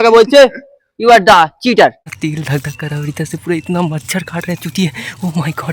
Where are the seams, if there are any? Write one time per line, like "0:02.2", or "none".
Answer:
0:02.1